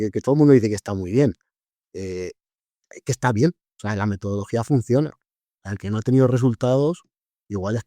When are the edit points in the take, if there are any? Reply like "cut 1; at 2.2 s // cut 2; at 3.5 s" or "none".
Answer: cut 1; at 5.8 s